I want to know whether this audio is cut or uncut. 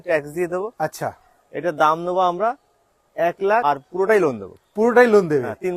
cut